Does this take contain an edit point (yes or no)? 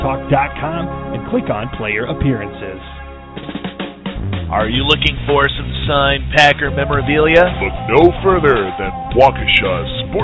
yes